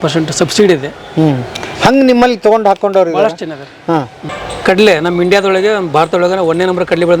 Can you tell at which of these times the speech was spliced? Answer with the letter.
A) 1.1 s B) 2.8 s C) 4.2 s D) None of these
C